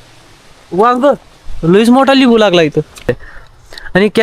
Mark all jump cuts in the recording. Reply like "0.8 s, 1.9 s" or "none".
3.1 s